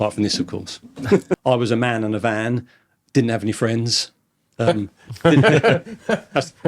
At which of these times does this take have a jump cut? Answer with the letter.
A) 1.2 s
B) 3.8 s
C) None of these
A